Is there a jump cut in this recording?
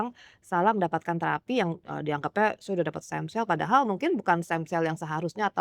no; 0 cuts

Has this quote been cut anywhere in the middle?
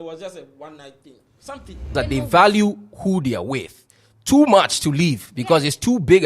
yes; 1 cut; at 1.9 s

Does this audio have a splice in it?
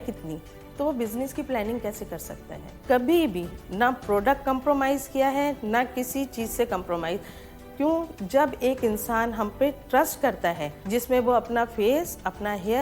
yes; 2 cuts; at 2.8 s, 10.7 s

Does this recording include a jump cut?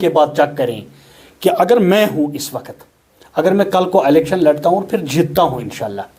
no; 0 cuts

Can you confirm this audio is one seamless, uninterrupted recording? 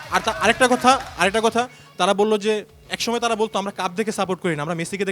yes; 0 cuts

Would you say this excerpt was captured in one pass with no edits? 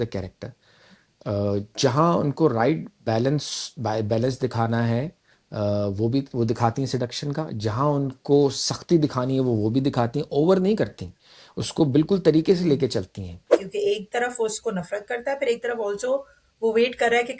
no; 1 cut; at 13.6 s

